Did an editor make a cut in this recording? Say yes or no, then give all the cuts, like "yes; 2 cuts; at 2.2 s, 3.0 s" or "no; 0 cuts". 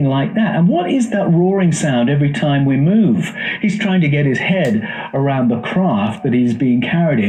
no; 0 cuts